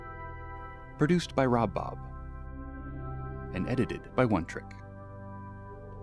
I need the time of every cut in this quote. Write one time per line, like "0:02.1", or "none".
0:01.7